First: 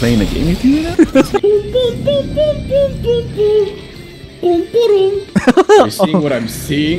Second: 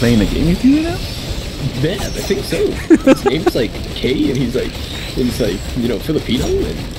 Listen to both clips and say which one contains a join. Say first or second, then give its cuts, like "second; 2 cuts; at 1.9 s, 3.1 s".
first; 2 cuts; at 1.1 s, 5.2 s